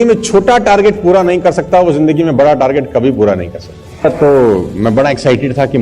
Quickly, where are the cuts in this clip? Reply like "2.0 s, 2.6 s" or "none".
4.0 s